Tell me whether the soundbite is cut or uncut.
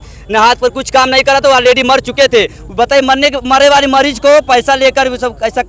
uncut